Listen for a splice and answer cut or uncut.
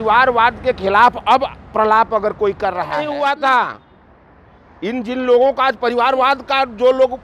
cut